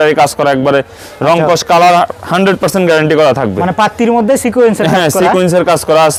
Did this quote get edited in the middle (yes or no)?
no